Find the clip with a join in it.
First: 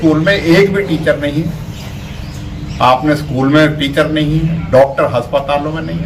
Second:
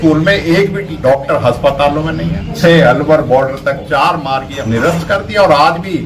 second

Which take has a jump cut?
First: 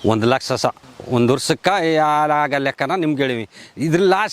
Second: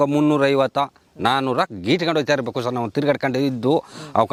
first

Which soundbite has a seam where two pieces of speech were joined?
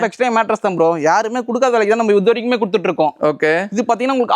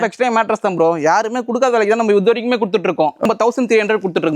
second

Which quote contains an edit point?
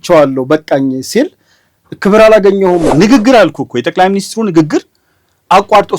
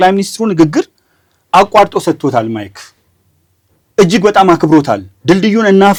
first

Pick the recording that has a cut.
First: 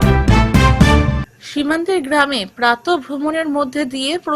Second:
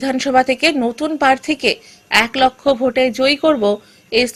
first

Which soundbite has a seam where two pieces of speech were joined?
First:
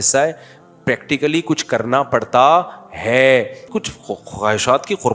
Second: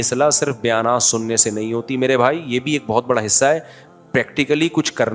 first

